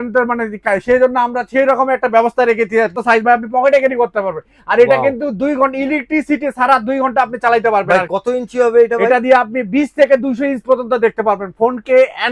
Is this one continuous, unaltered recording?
no; 1 cut; at 3.0 s

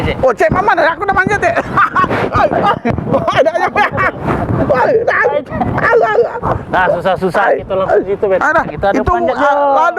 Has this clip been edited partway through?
no; 0 cuts

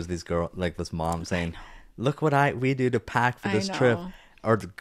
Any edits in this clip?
no; 0 cuts

